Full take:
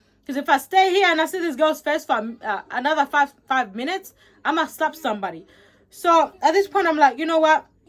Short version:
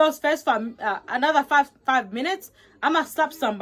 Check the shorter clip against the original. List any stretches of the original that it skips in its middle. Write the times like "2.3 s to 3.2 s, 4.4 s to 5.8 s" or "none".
none